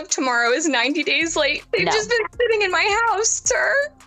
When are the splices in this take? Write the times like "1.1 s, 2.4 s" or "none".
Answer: 1.6 s